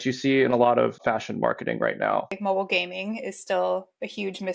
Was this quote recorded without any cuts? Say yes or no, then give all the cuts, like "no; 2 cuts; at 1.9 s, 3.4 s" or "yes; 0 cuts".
no; 2 cuts; at 1.0 s, 2.3 s